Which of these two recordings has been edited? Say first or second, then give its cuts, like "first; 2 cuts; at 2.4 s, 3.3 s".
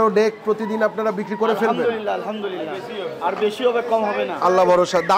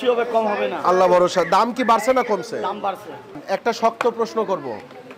second; 1 cut; at 3.4 s